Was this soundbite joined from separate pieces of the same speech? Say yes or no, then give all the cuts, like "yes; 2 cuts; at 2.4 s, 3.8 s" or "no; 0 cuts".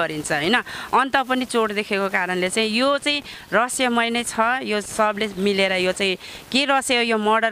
no; 0 cuts